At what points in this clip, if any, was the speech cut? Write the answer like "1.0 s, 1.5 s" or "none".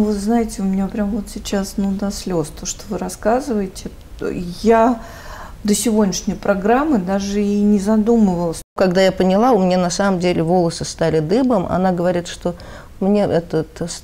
8.6 s